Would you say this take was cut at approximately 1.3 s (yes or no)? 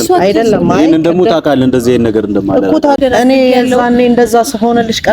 no